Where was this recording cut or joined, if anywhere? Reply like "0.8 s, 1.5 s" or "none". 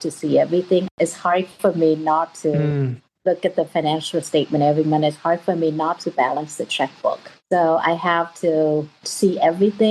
7.3 s, 9.0 s